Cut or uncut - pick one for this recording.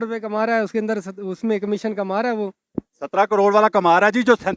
cut